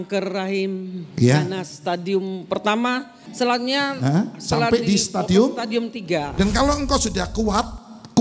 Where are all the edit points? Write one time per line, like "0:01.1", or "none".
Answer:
0:03.2
0:06.3